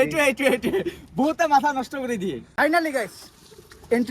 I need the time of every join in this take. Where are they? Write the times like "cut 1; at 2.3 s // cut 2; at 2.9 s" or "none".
cut 1; at 2.5 s